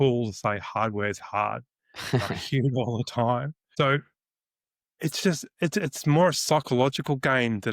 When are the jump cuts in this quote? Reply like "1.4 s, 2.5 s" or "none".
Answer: 3.6 s